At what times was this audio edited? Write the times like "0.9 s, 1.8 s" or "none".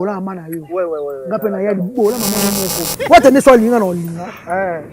3.0 s